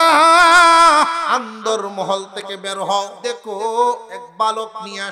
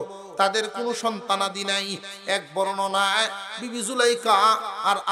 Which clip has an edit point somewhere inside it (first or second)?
first